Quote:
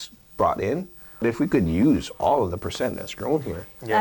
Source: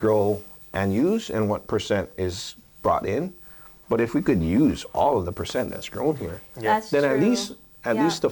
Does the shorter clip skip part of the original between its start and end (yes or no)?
yes